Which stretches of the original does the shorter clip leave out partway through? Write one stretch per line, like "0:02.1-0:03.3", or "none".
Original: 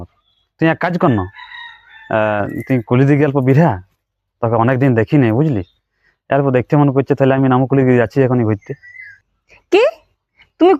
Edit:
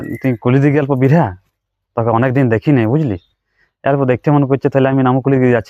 none